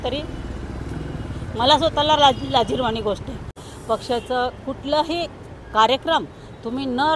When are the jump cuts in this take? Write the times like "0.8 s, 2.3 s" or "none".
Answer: 3.6 s